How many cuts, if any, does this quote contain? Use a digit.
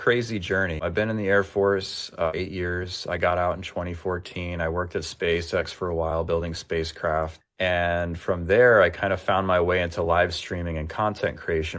3